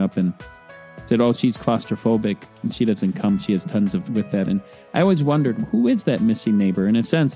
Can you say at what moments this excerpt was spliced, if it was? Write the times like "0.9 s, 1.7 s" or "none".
none